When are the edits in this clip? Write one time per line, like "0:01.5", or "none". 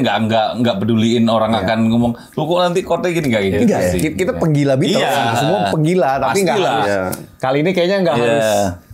none